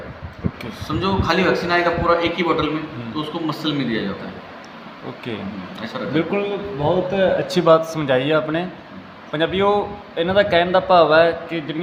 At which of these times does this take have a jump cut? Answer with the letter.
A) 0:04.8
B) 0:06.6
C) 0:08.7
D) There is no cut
D